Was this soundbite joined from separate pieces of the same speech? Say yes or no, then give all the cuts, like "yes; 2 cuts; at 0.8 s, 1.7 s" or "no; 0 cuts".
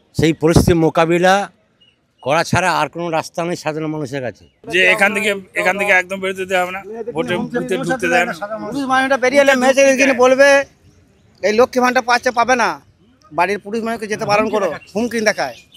yes; 1 cut; at 4.5 s